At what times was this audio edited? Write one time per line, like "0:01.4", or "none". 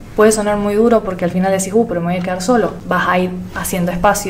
0:02.8